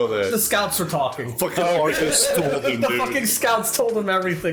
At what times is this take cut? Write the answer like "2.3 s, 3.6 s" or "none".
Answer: none